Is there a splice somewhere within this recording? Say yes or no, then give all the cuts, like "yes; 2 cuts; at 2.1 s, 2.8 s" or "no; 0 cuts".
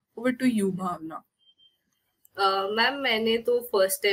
no; 0 cuts